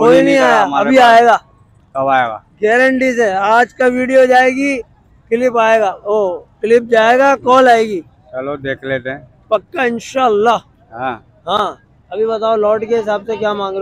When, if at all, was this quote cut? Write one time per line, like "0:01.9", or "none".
none